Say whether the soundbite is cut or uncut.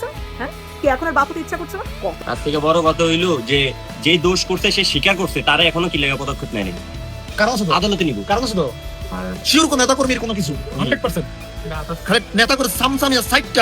cut